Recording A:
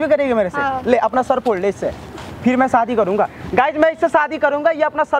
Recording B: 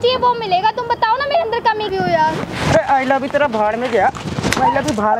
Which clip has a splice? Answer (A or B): B